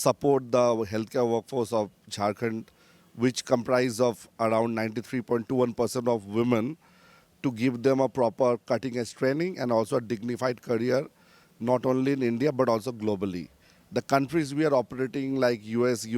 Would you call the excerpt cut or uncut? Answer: uncut